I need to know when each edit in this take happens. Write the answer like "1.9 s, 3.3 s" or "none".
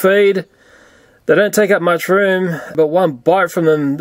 2.7 s